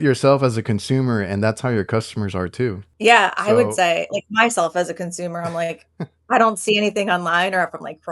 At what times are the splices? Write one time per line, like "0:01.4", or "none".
0:02.9

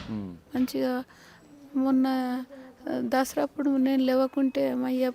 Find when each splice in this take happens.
none

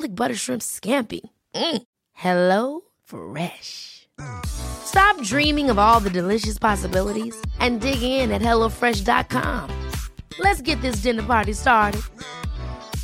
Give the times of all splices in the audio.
none

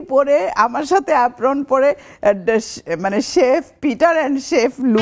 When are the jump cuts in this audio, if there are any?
none

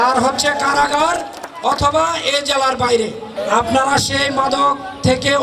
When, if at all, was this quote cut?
0:03.3

